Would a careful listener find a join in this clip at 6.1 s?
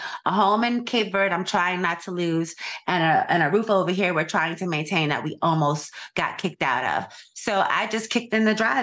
no; 0 cuts

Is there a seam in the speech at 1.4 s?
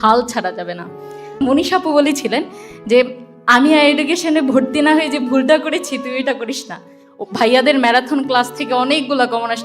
yes; 1 cut; at 1.4 s

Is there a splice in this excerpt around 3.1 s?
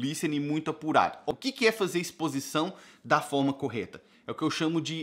no; 1 cut; at 1.3 s

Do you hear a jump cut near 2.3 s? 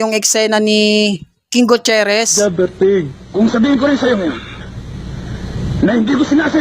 yes; 1 cut; at 2.3 s

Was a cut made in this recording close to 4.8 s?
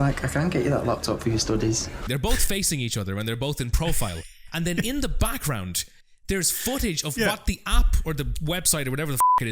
no; 1 cut; at 2.0 s

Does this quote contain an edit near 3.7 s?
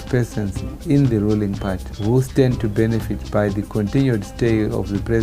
no; 1 cut; at 1.9 s

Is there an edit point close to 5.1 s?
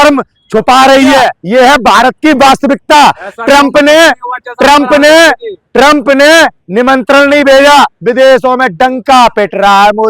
no; 1 cut; at 1.4 s

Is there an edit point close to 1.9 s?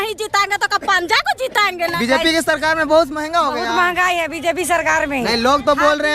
yes; 1 cut; at 1.9 s

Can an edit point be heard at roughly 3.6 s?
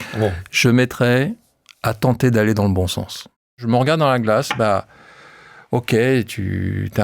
yes; 1 cut; at 3.6 s

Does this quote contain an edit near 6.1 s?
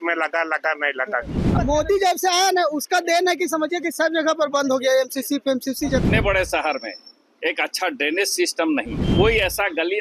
yes; 3 cuts; at 1.4 s, 6.1 s, 9.0 s

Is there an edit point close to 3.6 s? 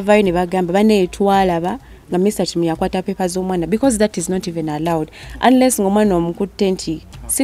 no; 0 cuts

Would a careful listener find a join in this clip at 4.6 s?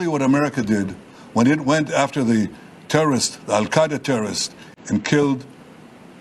yes; 1 cut; at 4.6 s

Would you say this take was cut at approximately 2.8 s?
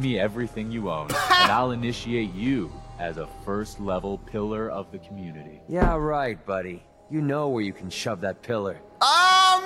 no; 0 cuts

